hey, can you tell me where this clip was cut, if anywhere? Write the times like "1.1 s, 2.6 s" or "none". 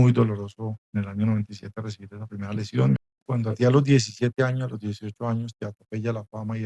3.0 s